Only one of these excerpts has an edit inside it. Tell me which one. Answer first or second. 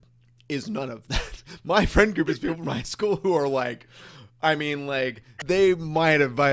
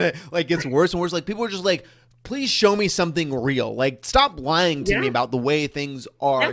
first